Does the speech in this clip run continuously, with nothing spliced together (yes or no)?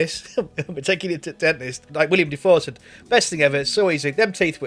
no